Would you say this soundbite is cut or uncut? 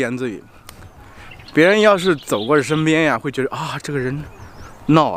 uncut